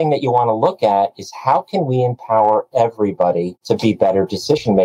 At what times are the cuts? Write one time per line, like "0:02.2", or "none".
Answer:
0:03.5